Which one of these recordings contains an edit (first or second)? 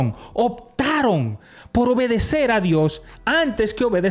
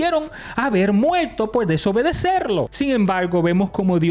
second